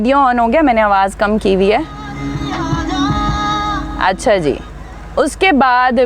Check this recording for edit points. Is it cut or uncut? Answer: uncut